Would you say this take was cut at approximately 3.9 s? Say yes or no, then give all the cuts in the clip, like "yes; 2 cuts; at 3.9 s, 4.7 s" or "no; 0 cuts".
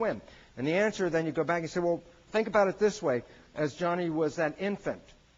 yes; 1 cut; at 3.9 s